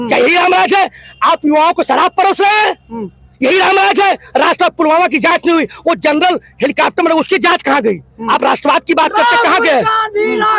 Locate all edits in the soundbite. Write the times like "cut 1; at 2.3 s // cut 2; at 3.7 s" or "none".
none